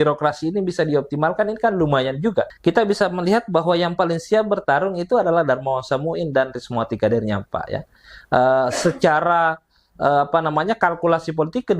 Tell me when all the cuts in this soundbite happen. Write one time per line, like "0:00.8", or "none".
0:02.5